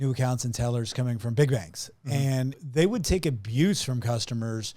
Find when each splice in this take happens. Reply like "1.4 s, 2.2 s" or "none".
2.6 s